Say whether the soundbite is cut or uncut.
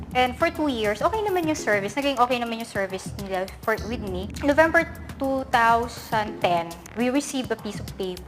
cut